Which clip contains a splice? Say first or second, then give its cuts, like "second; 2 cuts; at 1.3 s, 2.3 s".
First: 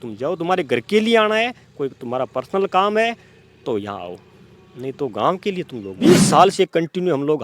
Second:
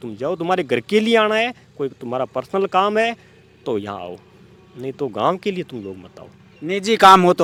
first; 1 cut; at 5.9 s